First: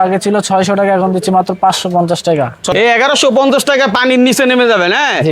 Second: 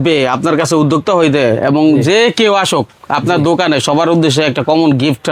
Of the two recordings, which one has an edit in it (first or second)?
first